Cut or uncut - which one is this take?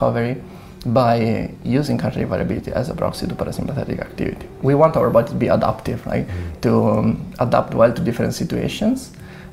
cut